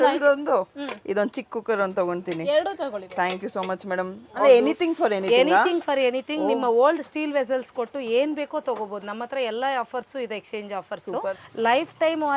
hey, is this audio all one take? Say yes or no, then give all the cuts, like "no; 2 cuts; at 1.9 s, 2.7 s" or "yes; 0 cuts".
no; 2 cuts; at 4.4 s, 11.4 s